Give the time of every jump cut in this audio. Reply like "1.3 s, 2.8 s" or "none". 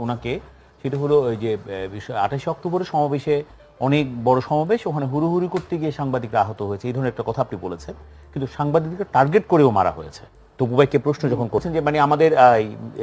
11.7 s